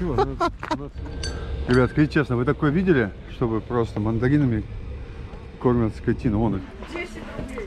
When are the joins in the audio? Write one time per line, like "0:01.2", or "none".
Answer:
0:00.9
0:06.7